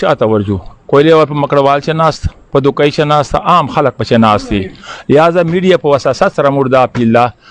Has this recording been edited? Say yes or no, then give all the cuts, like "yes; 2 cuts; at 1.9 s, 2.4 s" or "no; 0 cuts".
no; 0 cuts